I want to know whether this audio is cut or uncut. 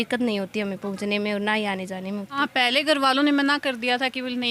cut